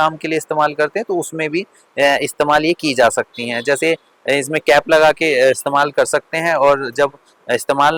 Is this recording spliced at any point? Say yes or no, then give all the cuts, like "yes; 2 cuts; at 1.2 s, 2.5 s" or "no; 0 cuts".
no; 0 cuts